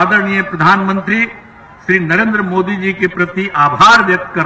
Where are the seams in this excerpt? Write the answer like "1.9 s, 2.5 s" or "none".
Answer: none